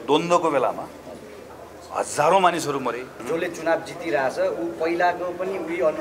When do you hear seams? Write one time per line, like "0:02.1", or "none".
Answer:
0:03.1